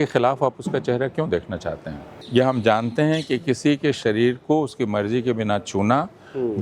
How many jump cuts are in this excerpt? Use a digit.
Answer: 1